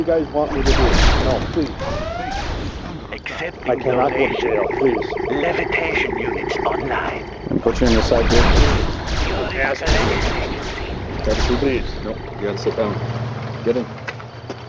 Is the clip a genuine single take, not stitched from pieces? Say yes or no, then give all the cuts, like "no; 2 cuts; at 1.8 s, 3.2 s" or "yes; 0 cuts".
yes; 0 cuts